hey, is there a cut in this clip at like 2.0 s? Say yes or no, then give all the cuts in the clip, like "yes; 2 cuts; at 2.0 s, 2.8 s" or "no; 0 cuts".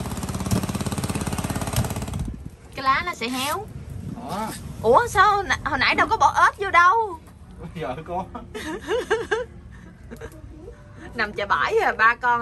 yes; 1 cut; at 2.0 s